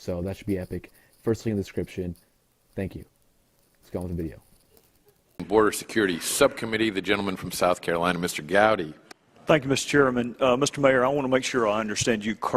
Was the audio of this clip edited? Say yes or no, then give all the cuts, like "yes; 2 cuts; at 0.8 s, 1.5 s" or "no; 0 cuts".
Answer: yes; 1 cut; at 5.6 s